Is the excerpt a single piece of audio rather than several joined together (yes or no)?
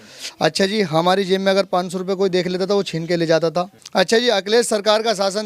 no